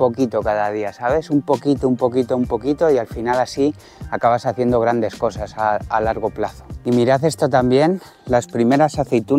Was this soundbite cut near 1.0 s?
no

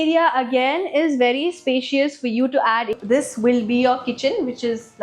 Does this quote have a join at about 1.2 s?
no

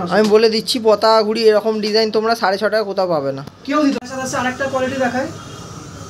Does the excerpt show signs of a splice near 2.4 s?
no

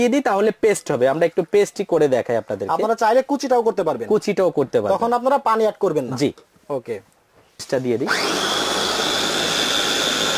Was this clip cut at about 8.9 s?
no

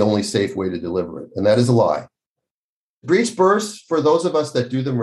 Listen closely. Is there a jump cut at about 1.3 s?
no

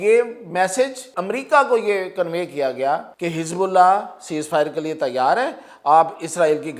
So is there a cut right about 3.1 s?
yes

